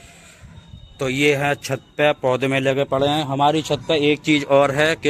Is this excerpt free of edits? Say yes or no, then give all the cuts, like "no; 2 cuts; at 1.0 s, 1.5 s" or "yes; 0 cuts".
yes; 0 cuts